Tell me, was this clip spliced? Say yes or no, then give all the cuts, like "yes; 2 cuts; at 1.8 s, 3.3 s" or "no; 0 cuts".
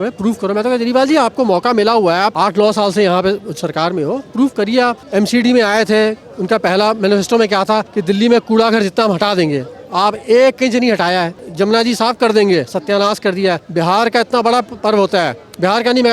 yes; 5 cuts; at 2.3 s, 5.0 s, 7.9 s, 11.4 s, 13.6 s